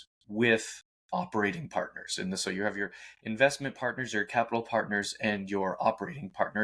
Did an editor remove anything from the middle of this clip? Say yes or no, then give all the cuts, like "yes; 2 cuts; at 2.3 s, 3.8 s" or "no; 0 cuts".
no; 0 cuts